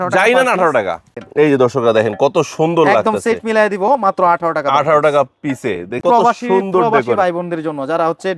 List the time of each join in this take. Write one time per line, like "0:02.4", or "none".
0:01.2
0:06.0